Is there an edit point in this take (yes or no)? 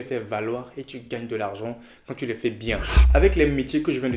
no